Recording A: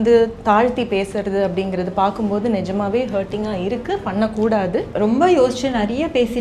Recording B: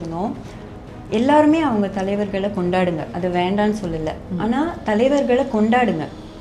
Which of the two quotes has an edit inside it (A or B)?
A